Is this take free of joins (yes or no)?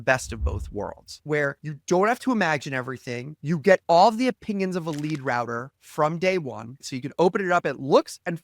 no